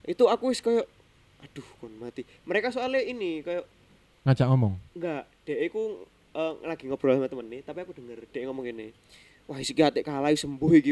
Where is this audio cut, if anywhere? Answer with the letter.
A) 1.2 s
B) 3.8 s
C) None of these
C